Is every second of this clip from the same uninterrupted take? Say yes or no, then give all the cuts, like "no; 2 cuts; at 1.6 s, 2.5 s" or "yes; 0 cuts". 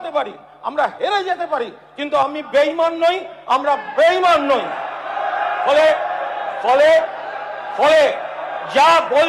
yes; 0 cuts